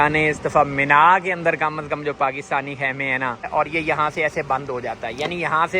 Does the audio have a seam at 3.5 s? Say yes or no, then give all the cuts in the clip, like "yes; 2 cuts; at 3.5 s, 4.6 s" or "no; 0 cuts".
yes; 1 cut; at 3.5 s